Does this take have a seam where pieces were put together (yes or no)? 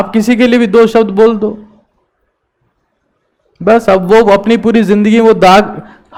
no